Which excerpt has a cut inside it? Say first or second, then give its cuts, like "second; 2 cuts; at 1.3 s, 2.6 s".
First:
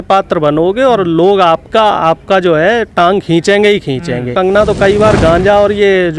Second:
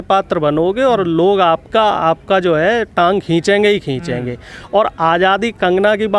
first; 1 cut; at 4.3 s